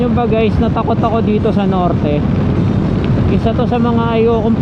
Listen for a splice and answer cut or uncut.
uncut